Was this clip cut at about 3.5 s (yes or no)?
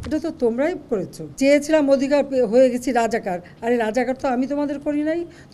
no